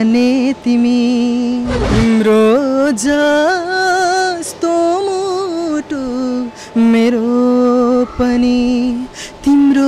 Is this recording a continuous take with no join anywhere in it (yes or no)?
no